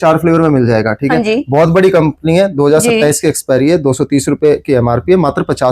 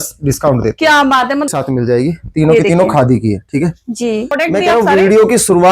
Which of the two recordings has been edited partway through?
second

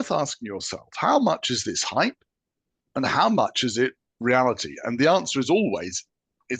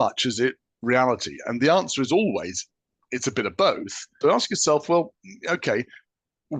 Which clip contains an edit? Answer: second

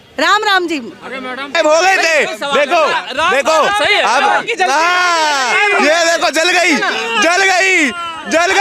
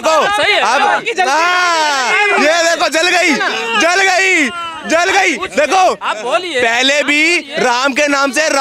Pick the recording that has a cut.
first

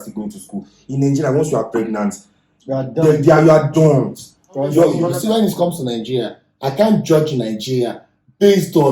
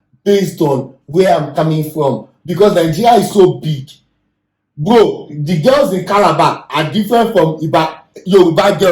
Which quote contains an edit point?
first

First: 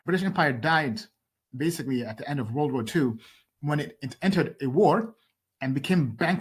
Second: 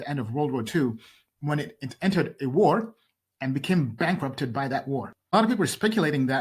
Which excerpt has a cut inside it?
second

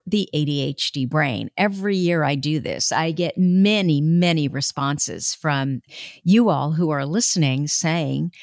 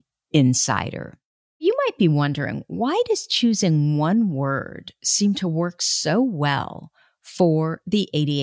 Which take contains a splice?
second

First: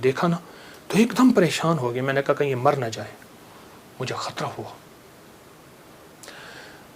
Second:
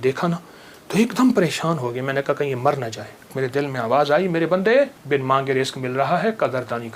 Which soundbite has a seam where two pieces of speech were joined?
second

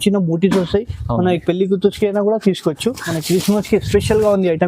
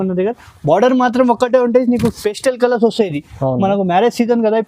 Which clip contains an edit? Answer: first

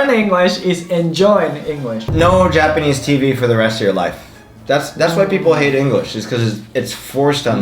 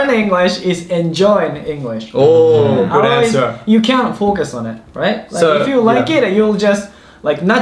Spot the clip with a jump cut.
first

